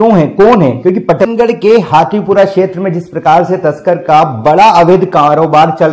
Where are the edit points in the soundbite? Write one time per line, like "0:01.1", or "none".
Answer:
0:01.3